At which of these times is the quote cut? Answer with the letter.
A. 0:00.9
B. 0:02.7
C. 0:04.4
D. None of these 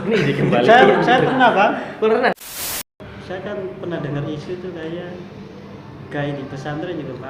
B